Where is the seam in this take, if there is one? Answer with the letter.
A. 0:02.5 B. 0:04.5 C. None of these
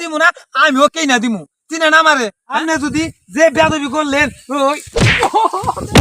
A